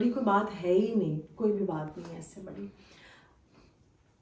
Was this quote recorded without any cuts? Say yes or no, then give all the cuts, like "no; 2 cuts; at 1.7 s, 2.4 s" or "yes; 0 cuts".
yes; 0 cuts